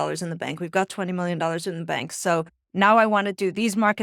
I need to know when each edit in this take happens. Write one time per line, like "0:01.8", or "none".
none